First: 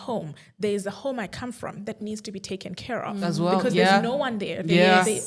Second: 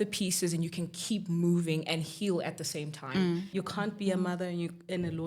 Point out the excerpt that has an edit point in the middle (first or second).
second